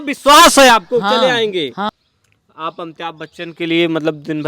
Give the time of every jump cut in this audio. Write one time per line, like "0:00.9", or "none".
0:01.9